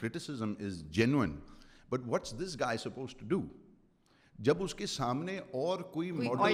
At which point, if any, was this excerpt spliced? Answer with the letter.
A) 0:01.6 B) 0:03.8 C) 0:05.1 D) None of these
D